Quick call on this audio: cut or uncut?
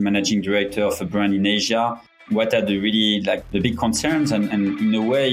cut